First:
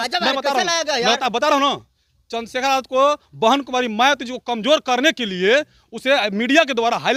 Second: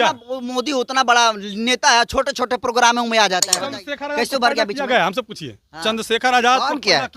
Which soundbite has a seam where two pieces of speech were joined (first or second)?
second